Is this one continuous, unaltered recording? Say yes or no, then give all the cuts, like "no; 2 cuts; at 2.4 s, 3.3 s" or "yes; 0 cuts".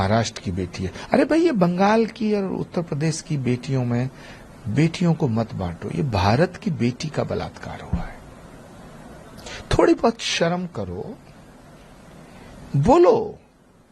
yes; 0 cuts